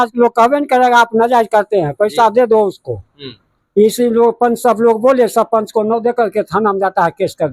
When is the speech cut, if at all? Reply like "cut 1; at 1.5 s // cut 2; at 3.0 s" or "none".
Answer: none